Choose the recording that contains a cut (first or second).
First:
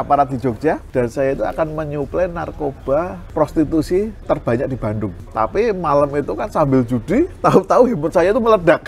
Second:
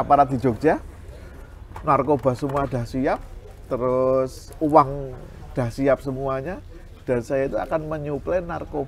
first